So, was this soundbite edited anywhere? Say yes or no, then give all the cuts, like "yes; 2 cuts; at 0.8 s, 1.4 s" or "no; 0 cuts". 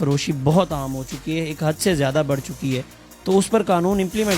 no; 0 cuts